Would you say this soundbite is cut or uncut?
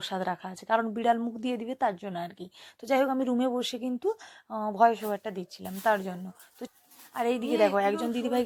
uncut